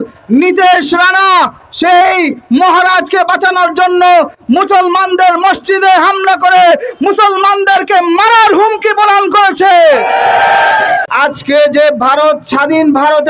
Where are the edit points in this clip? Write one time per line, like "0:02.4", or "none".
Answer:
0:11.1